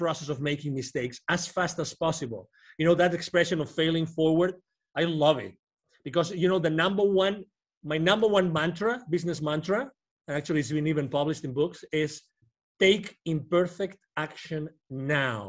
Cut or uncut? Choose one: uncut